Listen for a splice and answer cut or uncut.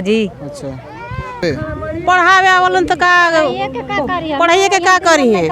cut